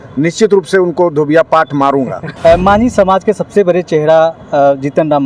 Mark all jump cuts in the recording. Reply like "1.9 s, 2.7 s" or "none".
2.2 s